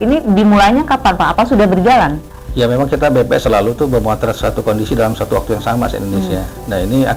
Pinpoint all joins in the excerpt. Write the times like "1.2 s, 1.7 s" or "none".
none